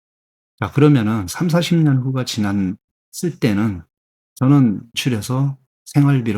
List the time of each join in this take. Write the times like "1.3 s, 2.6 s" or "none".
5.0 s